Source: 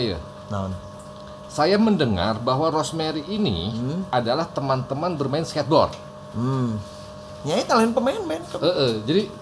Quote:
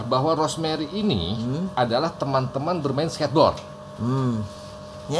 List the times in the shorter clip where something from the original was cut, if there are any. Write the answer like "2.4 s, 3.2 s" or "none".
none